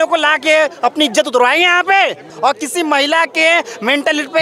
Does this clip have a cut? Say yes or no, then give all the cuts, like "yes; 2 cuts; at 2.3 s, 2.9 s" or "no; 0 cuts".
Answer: yes; 1 cut; at 2.3 s